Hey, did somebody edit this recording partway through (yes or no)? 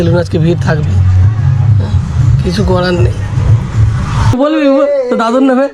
yes